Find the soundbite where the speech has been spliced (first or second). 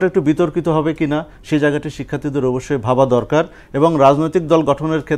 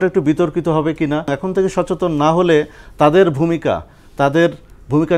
second